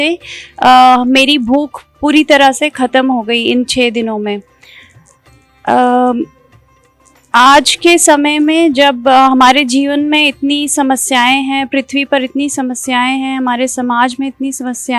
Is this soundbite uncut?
yes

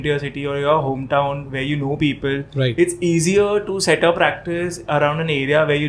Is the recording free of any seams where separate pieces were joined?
yes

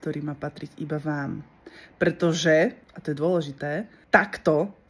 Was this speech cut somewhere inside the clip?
yes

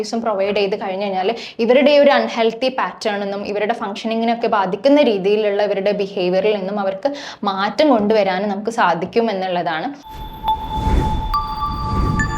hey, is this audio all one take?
no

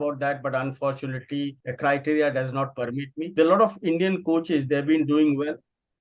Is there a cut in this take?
yes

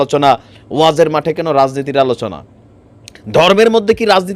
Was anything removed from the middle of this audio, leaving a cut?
no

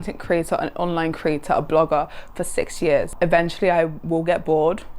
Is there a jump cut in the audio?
yes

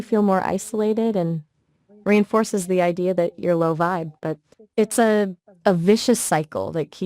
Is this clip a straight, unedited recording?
no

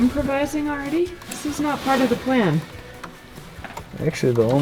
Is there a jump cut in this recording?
no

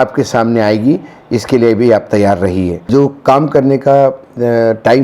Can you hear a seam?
yes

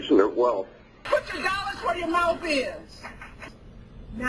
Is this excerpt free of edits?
yes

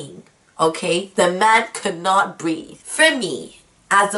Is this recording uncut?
no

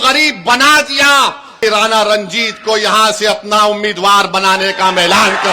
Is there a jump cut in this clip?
yes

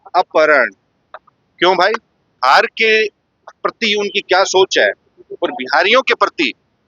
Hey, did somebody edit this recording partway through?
yes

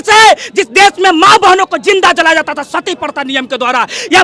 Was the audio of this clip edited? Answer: no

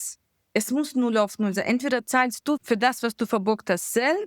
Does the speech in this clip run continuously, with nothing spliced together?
no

